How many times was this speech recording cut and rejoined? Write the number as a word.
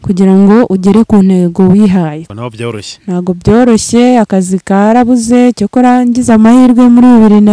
one